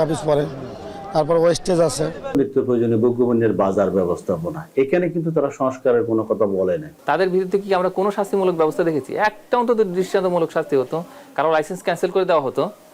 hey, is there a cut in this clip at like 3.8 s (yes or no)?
no